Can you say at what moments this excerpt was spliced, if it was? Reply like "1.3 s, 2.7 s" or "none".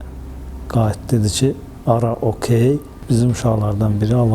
2.9 s